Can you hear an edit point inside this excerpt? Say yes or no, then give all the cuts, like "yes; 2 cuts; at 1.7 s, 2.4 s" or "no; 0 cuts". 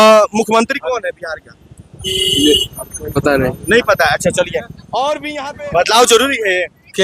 yes; 1 cut; at 5.3 s